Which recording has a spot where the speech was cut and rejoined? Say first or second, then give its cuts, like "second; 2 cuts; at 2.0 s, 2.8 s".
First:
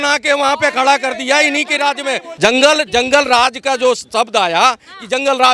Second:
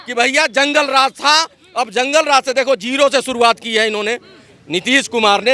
first; 1 cut; at 2.3 s